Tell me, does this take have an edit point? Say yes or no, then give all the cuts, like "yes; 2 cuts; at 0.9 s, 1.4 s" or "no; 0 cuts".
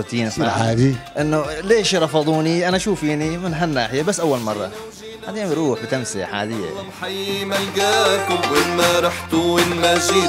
yes; 1 cut; at 7.0 s